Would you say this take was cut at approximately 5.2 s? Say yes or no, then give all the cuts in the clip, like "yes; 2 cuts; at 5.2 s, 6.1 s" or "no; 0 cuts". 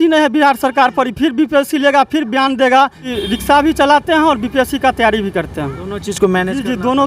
no; 1 cut; at 3.1 s